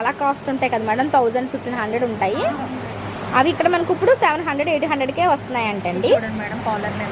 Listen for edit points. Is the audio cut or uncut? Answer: uncut